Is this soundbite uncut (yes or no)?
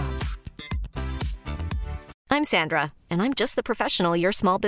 no